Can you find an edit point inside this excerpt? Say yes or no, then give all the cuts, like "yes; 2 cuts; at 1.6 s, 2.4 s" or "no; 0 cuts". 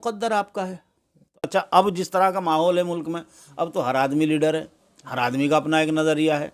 yes; 1 cut; at 1.5 s